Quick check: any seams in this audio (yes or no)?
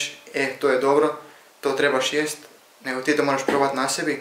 no